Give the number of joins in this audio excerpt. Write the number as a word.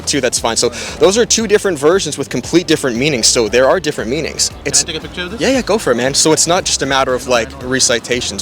one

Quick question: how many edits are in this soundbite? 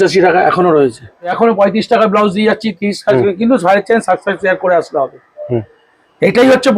one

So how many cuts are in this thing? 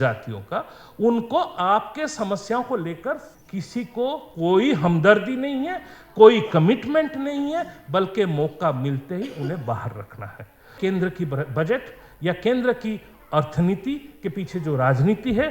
two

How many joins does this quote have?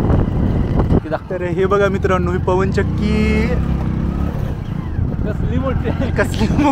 one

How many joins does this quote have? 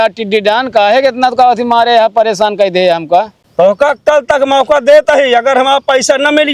one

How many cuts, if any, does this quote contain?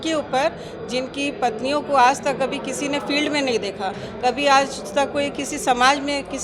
zero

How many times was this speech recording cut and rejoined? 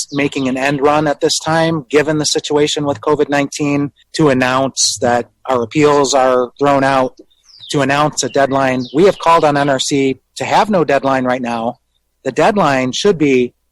two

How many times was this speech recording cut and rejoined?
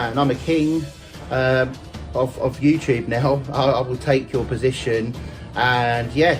zero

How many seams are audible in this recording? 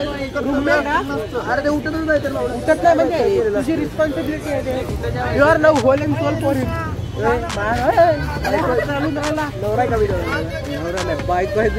zero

